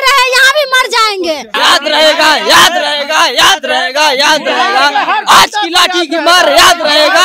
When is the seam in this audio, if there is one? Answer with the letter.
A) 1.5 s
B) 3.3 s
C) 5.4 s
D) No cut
A